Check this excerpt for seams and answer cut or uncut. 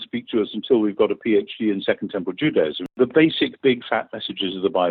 cut